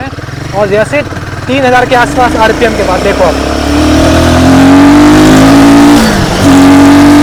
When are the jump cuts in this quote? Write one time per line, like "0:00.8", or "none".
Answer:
none